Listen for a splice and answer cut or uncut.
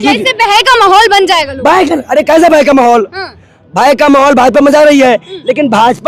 uncut